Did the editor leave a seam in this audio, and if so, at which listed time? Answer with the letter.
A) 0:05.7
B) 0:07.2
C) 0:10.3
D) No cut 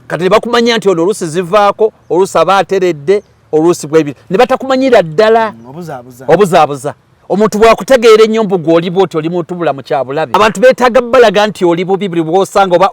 C